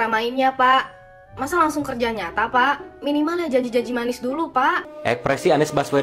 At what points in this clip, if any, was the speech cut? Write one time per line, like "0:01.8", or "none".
0:04.9